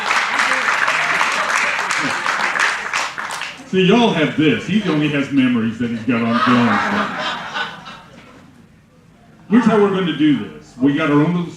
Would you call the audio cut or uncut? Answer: uncut